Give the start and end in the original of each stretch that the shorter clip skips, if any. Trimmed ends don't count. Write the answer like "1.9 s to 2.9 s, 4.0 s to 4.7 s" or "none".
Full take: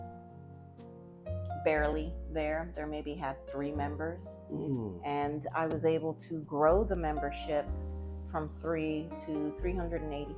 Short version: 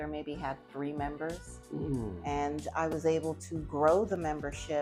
none